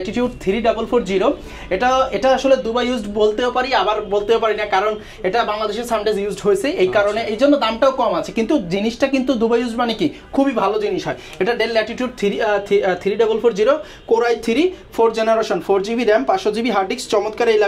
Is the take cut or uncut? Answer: uncut